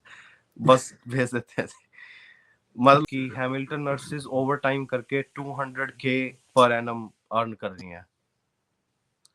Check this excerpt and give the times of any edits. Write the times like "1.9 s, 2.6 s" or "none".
3.1 s